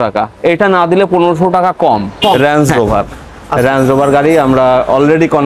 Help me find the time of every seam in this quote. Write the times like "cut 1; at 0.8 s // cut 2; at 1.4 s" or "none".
cut 1; at 2.4 s